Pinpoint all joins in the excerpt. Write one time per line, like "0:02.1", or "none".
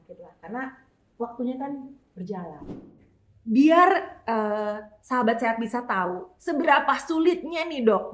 0:02.7